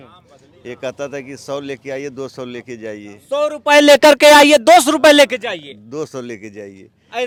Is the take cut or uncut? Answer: uncut